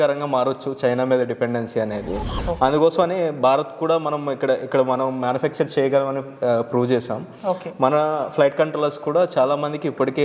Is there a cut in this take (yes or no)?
no